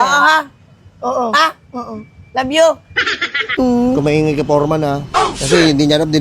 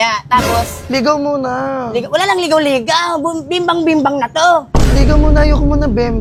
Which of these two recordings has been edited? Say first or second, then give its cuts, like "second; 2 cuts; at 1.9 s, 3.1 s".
first; 1 cut; at 3.5 s